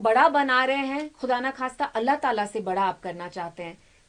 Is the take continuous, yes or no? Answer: yes